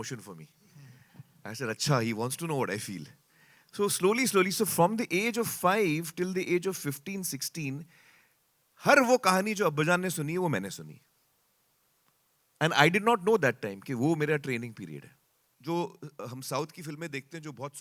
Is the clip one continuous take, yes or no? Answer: no